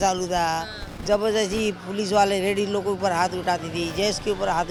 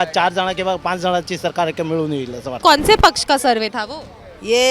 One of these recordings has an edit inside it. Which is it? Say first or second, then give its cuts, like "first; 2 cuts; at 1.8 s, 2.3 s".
second; 1 cut; at 2.6 s